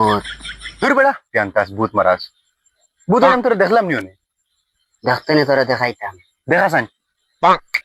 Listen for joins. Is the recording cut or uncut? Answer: uncut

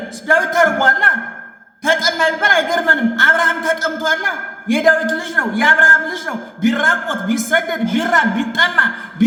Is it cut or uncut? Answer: uncut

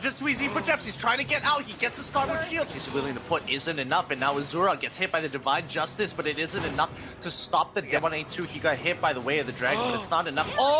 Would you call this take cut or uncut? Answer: cut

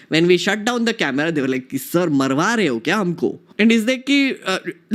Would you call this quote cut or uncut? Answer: cut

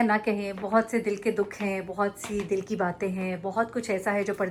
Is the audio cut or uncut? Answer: uncut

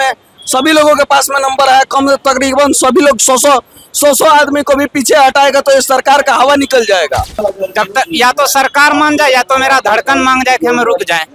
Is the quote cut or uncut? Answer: cut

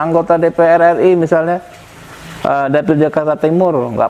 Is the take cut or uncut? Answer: uncut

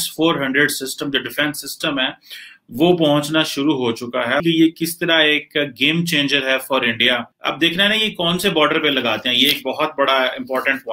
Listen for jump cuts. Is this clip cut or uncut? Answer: uncut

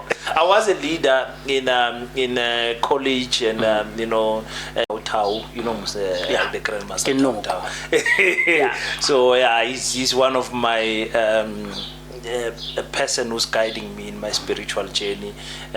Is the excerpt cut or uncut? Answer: cut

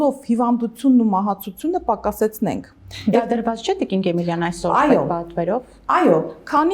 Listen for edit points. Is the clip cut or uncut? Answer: uncut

